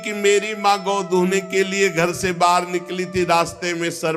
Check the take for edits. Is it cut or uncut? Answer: uncut